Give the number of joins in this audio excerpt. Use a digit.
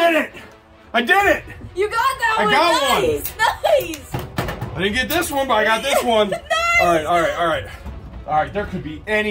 0